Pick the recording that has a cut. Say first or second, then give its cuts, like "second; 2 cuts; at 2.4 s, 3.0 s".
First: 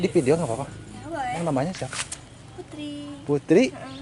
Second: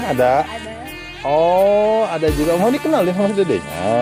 first; 1 cut; at 1.4 s